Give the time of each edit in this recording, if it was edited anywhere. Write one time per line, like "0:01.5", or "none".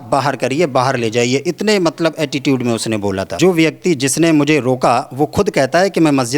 0:03.3